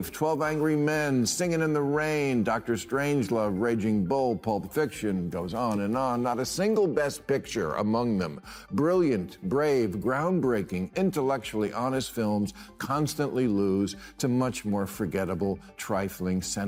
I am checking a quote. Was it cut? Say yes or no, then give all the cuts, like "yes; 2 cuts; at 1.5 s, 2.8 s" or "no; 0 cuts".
no; 0 cuts